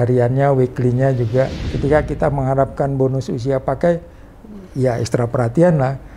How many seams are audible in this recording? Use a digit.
1